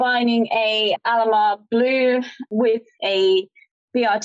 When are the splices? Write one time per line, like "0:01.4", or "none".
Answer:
0:02.4